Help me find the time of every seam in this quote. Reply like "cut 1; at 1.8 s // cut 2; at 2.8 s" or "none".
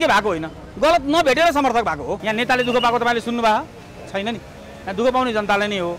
cut 1; at 2.2 s